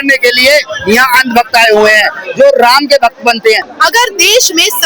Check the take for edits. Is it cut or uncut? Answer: cut